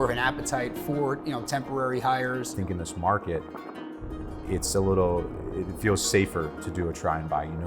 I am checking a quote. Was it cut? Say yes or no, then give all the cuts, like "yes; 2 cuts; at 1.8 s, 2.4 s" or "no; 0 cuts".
yes; 1 cut; at 2.5 s